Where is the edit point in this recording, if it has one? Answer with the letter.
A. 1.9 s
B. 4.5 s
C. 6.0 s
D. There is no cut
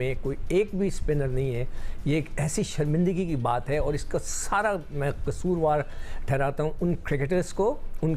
D